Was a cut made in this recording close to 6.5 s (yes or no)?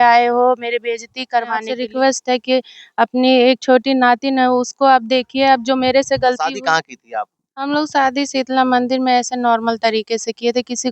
yes